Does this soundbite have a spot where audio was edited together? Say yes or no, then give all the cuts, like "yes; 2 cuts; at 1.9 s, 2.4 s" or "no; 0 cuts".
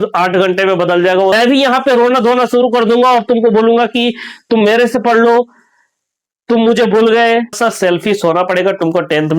yes; 2 cuts; at 1.3 s, 7.6 s